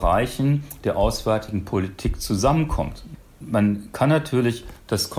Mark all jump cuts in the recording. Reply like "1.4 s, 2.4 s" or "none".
none

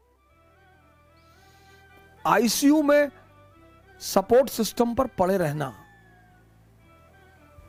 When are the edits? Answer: none

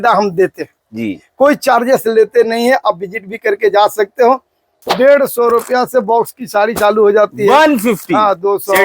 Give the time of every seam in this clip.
4.8 s

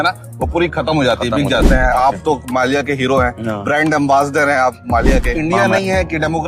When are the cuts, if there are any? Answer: 1.7 s, 5.3 s

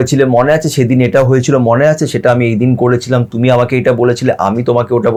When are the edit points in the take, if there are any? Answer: none

